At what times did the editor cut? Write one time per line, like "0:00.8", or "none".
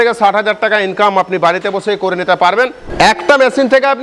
0:02.8